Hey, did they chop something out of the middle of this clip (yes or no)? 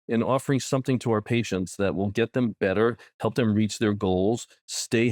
no